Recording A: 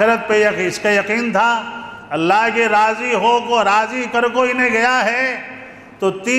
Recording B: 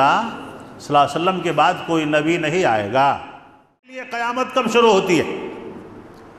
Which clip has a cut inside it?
B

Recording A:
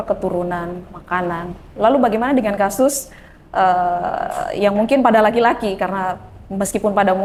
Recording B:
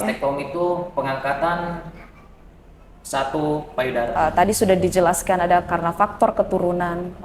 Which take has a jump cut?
B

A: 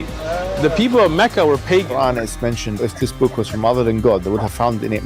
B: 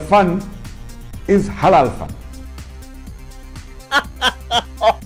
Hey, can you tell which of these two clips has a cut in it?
A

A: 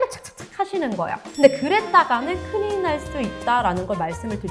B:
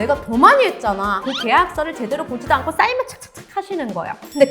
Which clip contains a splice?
B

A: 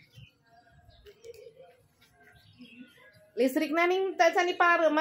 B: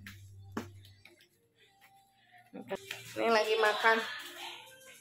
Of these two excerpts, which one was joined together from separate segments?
B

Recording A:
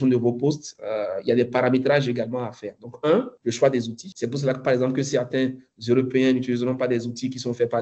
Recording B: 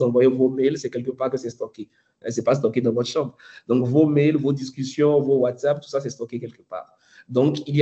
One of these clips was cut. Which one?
A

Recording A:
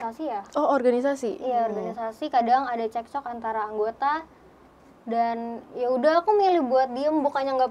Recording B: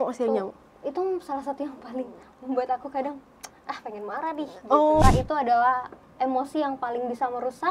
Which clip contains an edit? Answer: B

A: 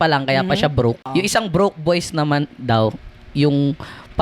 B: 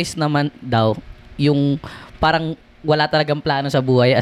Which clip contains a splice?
A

